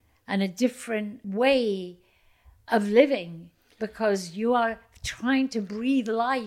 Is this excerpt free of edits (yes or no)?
no